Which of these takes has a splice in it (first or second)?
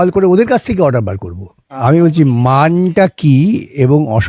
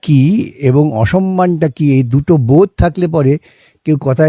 first